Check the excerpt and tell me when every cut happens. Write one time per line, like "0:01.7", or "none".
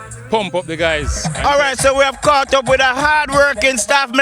0:01.2